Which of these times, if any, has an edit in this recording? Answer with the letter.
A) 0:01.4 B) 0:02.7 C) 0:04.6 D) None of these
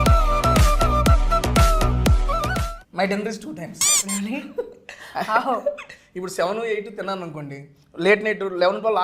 B